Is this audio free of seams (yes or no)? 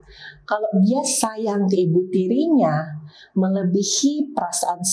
yes